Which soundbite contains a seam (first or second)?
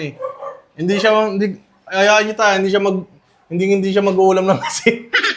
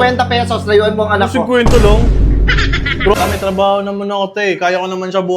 second